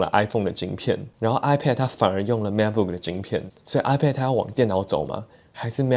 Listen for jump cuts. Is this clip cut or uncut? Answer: uncut